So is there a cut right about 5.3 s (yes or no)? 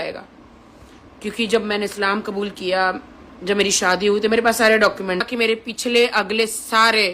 yes